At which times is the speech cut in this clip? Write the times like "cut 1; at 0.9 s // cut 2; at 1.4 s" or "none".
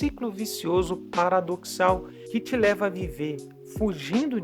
cut 1; at 2.1 s